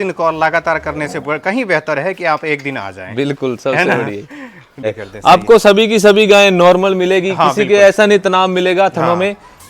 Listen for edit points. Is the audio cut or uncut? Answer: cut